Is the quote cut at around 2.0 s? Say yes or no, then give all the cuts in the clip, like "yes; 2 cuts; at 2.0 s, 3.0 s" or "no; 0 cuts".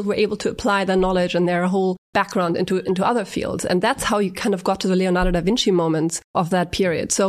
yes; 2 cuts; at 2.0 s, 6.3 s